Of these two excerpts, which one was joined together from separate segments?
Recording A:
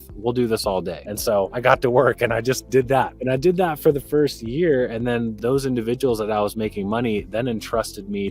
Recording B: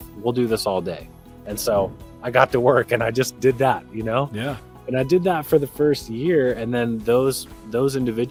A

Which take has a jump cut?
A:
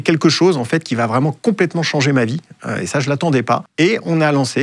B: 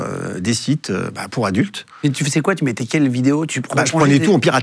A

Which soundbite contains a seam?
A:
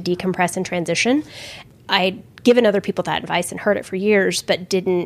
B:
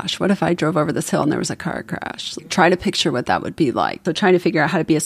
B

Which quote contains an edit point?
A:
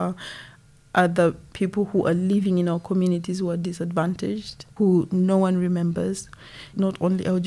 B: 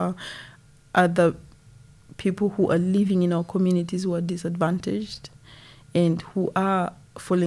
A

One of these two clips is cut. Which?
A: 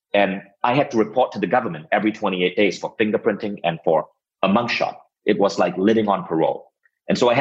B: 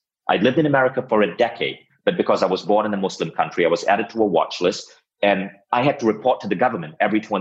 A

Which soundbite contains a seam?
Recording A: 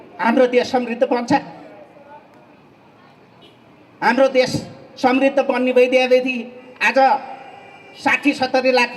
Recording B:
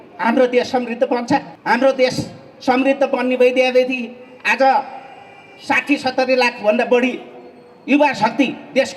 B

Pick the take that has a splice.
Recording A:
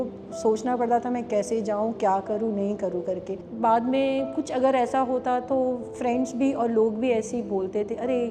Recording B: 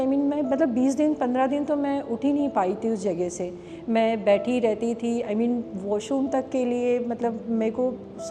A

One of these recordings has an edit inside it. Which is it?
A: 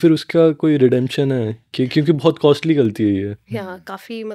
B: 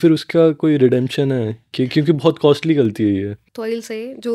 B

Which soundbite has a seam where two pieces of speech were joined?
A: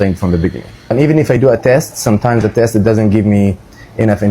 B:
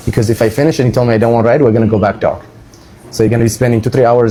A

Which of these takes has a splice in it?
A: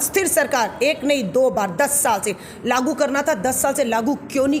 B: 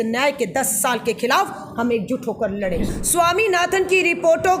B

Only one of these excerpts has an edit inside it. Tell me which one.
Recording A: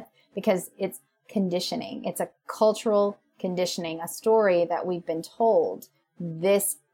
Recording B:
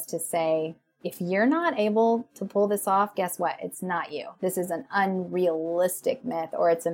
A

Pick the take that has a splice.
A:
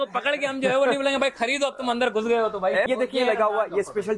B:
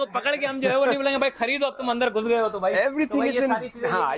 A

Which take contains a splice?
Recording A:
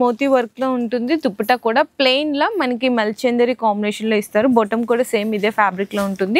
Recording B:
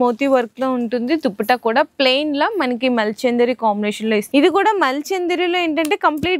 B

